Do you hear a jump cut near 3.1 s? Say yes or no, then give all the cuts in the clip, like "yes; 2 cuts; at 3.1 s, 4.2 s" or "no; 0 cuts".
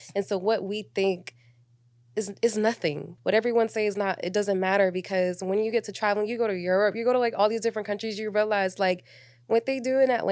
yes; 1 cut; at 3.1 s